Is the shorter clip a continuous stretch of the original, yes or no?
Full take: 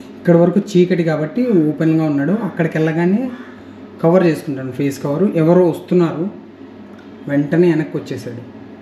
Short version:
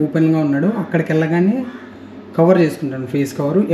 yes